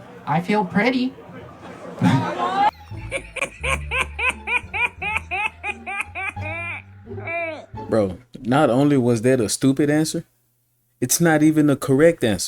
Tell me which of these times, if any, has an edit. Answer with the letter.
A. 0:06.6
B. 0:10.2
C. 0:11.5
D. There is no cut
D